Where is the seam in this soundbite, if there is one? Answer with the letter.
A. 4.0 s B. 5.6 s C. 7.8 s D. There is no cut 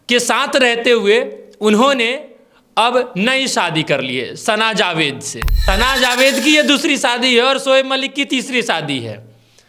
B